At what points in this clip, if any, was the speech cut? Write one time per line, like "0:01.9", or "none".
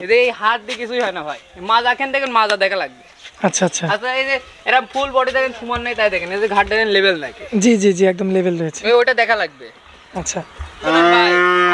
0:10.8